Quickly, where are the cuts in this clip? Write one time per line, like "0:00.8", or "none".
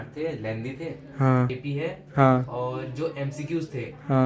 0:01.5